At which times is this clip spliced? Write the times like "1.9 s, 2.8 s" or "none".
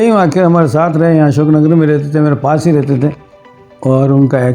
3.2 s